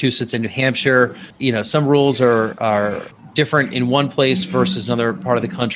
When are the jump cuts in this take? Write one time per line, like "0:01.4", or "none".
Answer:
none

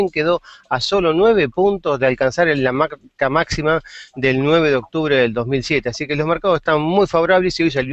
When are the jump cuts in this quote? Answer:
none

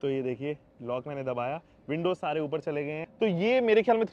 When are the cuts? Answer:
0:03.0

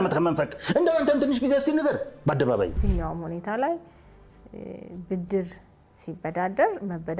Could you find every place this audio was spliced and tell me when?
0:02.8

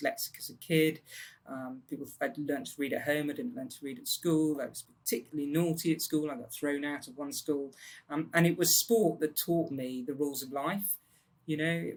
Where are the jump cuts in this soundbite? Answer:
none

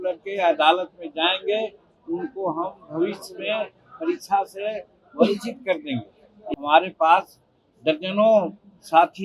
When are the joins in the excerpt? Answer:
0:06.3

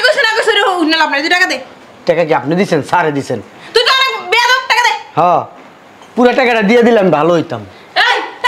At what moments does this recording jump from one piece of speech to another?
none

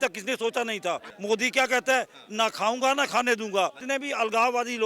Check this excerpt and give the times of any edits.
0:01.1
0:03.8

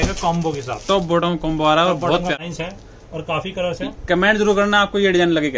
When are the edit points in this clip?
0:02.4

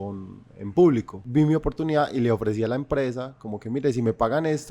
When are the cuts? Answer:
0:01.2

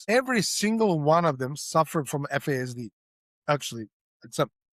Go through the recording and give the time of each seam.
none

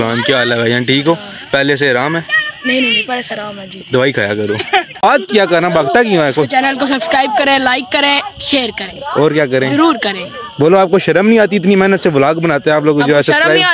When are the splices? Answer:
0:05.0

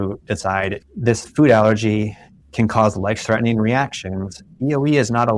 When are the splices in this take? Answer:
none

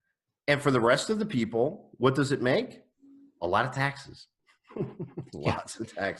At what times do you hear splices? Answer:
none

